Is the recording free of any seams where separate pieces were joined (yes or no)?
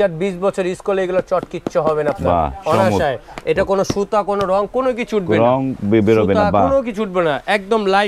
yes